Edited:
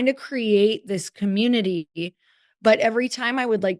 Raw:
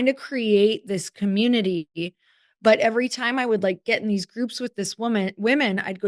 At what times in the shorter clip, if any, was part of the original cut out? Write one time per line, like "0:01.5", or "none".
none